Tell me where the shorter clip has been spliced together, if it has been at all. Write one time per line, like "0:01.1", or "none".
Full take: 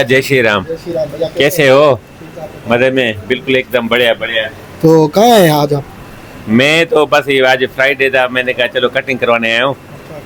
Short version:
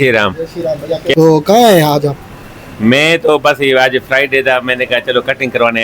0:01.1